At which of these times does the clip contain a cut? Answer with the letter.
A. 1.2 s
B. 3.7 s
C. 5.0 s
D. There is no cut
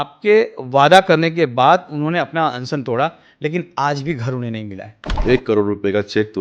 C